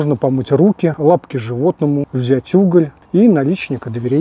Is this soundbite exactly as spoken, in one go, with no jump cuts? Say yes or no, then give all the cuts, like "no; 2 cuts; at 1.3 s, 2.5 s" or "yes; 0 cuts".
no; 3 cuts; at 1.0 s, 2.1 s, 3.0 s